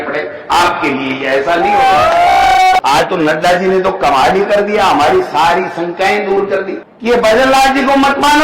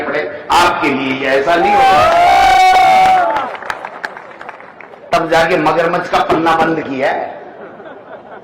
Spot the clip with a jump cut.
first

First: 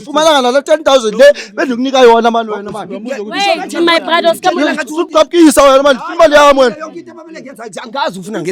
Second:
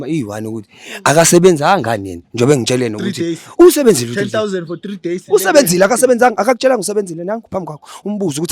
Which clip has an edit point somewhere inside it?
second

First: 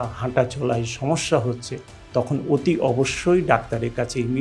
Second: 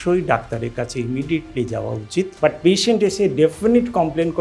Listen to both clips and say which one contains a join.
second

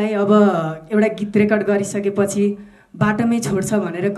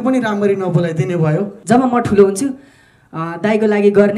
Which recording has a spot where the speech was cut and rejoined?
second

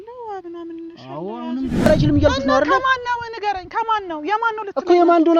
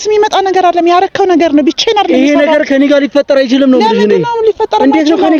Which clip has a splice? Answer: first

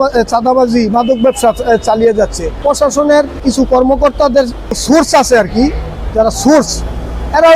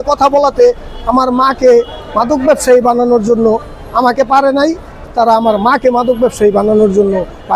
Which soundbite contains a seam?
first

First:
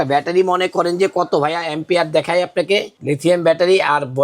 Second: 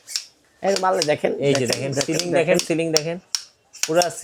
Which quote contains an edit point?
first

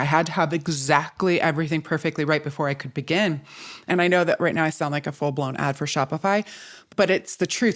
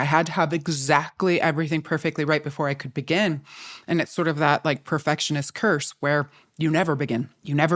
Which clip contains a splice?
first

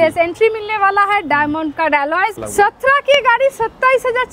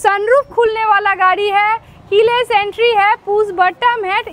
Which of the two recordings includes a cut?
first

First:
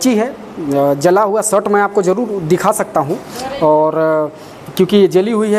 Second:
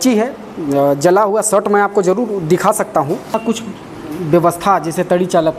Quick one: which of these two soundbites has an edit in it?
second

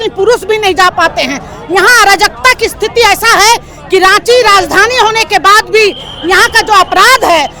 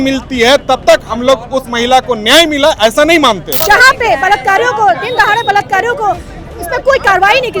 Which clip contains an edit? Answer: second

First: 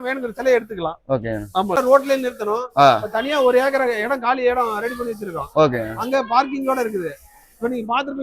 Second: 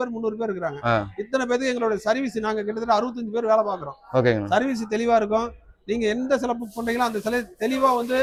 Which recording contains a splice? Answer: first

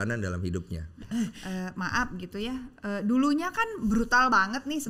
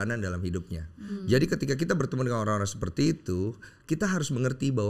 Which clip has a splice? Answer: first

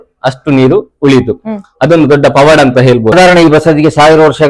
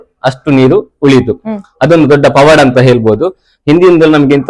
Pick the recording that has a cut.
first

